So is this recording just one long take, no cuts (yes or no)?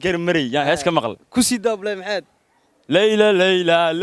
yes